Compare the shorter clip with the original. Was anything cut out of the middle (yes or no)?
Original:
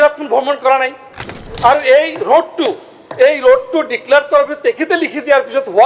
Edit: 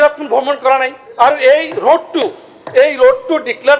yes